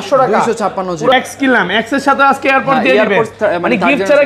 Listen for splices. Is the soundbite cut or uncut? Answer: cut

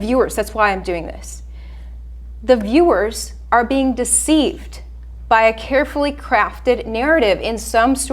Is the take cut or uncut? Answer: uncut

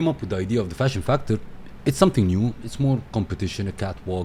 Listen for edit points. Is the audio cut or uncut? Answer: uncut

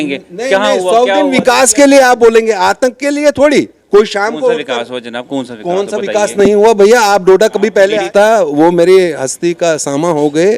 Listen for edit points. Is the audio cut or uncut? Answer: cut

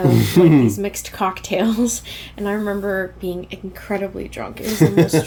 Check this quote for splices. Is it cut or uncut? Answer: uncut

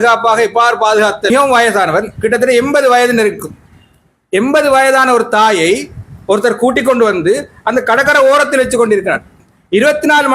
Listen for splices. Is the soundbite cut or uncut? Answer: cut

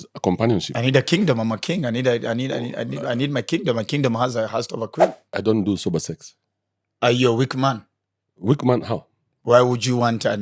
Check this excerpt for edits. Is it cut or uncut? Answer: cut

